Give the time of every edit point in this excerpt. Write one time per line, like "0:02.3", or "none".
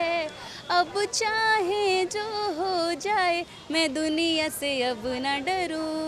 none